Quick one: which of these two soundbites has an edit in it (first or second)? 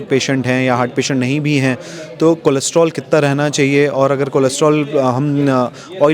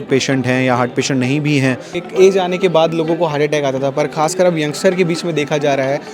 second